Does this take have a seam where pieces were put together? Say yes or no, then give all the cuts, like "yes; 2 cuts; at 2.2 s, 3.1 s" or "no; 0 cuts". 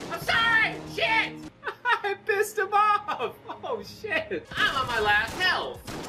yes; 1 cut; at 4.5 s